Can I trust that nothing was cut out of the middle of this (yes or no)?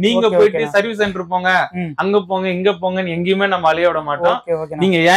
yes